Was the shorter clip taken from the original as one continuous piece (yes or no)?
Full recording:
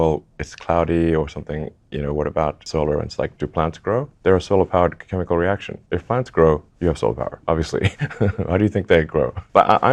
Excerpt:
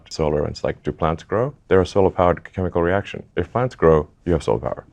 yes